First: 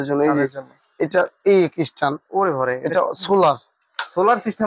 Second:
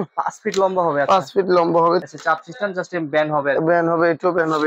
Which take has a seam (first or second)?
second